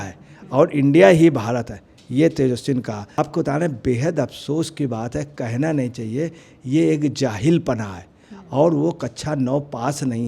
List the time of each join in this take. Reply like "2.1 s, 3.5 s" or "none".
3.0 s